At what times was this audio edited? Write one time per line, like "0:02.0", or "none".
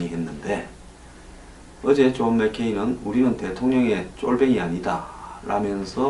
none